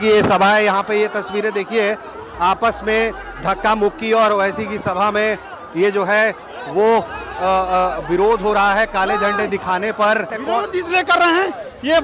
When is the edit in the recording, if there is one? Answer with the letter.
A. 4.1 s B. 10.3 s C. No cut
B